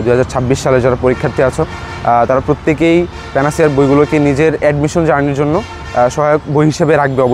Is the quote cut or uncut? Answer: uncut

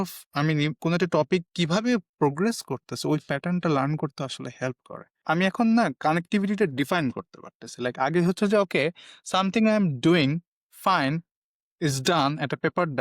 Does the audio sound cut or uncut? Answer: cut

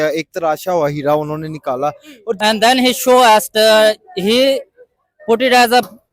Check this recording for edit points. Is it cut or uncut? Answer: cut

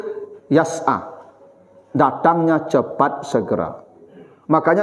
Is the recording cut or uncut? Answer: uncut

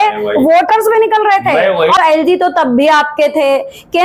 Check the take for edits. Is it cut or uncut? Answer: cut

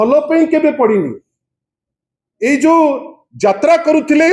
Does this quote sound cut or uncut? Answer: uncut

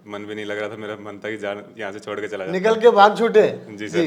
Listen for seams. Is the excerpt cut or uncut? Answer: uncut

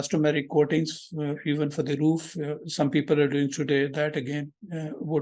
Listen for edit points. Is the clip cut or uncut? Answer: uncut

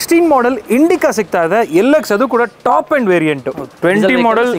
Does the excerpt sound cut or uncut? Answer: cut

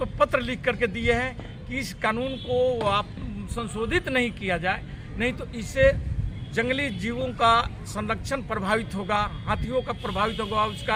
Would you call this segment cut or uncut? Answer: uncut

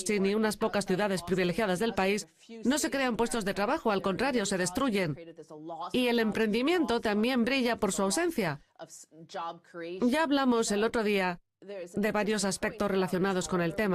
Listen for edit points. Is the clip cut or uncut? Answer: uncut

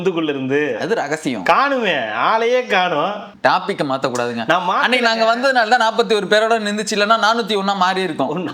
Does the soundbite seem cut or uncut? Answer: cut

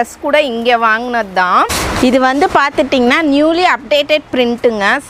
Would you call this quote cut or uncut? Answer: cut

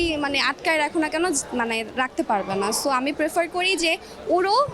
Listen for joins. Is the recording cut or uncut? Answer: uncut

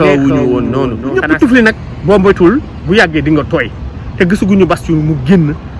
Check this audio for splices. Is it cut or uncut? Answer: cut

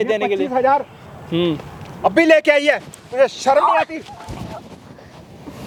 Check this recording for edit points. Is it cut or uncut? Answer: uncut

